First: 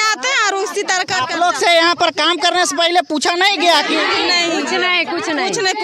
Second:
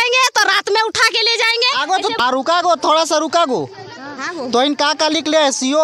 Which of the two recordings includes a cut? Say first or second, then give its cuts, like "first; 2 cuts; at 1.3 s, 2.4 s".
second; 1 cut; at 2.2 s